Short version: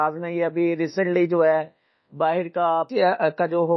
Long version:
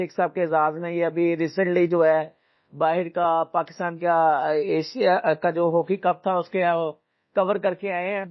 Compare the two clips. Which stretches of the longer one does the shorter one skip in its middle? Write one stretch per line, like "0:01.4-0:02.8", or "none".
0:03.5-0:04.9